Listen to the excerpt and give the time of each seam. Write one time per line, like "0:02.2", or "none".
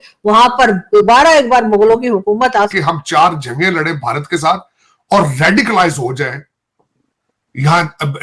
0:02.7